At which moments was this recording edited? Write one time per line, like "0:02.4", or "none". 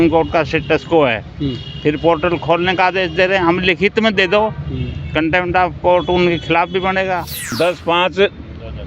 0:07.4